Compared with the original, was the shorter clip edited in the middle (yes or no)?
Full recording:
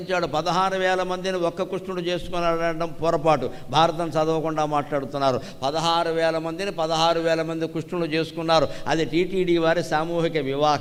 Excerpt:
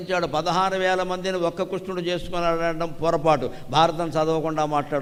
no